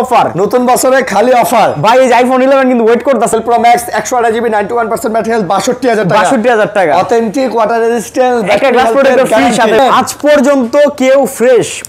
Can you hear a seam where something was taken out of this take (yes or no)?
yes